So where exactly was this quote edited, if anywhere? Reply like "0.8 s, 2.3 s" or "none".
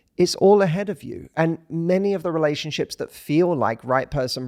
none